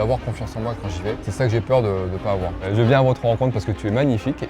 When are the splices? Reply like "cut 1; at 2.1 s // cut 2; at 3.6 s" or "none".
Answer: cut 1; at 1.3 s // cut 2; at 2.7 s